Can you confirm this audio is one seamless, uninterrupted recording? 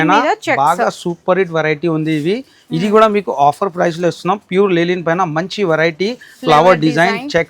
yes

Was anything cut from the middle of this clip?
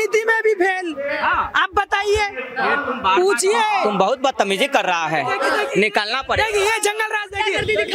no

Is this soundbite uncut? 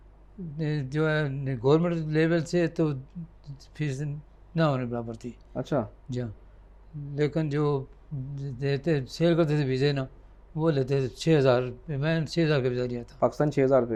yes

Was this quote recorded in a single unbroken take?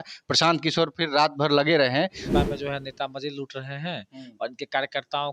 no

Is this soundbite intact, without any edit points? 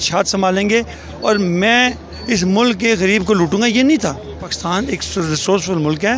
no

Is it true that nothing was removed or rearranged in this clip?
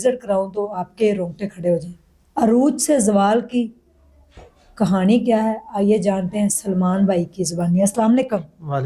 yes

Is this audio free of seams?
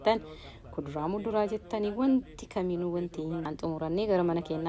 no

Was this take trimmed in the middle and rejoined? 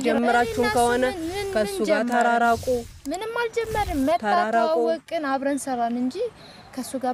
no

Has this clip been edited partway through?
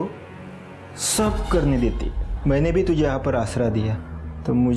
no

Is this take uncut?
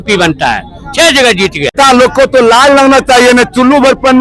no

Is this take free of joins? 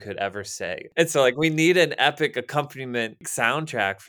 no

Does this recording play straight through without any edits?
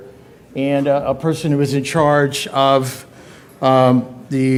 yes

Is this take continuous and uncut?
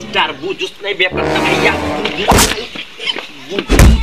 yes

